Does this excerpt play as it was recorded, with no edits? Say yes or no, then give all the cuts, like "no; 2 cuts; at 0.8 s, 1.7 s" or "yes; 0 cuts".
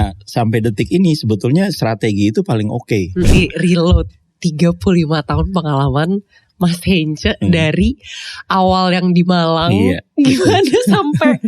no; 1 cut; at 3.3 s